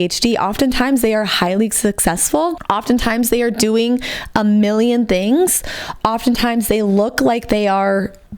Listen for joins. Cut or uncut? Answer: cut